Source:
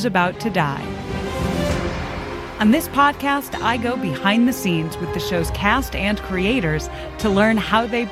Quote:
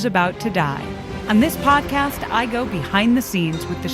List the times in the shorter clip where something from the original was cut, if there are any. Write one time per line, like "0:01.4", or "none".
0:01.1